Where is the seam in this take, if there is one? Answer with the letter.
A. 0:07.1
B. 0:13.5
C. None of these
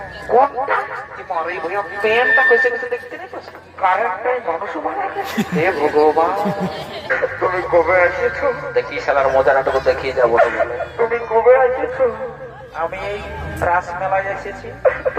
A